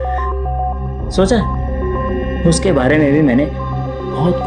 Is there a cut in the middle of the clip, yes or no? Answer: no